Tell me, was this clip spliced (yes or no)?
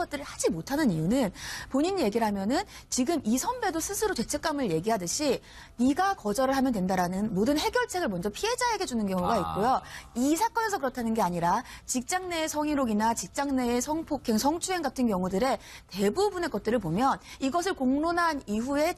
yes